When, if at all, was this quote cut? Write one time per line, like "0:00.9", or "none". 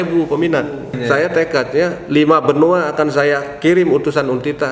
0:01.0